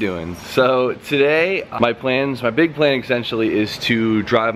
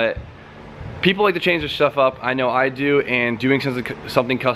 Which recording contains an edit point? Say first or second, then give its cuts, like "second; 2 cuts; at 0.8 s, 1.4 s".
second; 1 cut; at 2.0 s